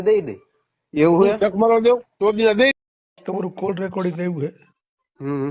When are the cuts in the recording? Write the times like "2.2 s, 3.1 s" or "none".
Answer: 2.7 s